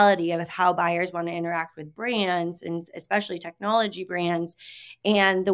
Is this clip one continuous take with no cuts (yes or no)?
yes